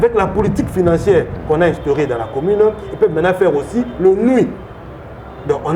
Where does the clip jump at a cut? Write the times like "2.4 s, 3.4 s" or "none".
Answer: none